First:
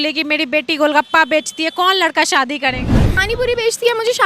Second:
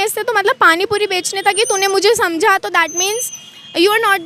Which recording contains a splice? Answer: first; 1 cut; at 3.2 s

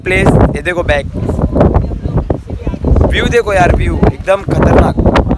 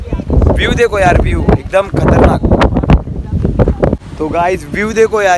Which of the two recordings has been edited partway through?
second; 1 cut; at 4.0 s

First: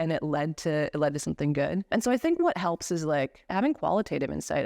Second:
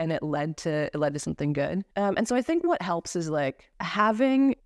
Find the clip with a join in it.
first; 2 cuts; at 1.9 s, 3.5 s

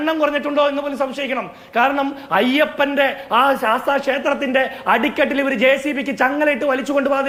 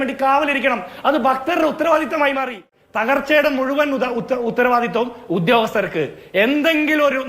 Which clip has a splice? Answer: second; 1 cut; at 2.7 s

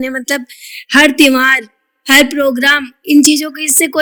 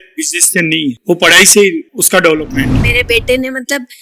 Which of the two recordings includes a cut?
second; 2 cuts; at 1.0 s, 2.4 s

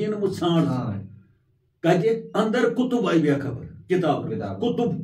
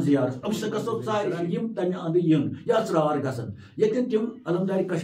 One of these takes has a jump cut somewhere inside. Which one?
second; 1 cut; at 1.3 s

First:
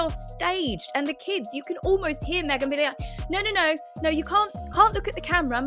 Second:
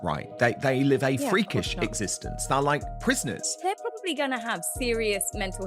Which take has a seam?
second; 1 cut; at 3.5 s

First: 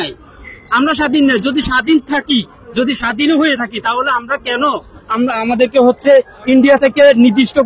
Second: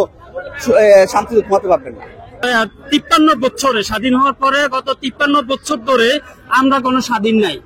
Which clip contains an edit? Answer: second; 1 cut; at 2.5 s

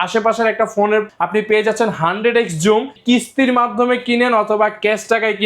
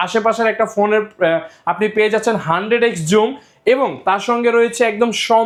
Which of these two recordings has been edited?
first; 2 cuts; at 1.1 s, 3.0 s

